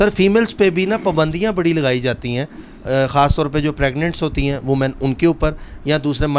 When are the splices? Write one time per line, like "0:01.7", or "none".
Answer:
none